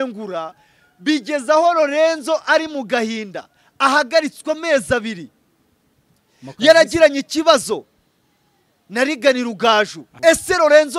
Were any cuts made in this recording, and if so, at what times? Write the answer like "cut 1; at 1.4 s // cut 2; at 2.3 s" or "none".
cut 1; at 10.0 s